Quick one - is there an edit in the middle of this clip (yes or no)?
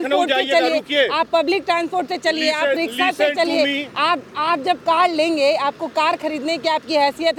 no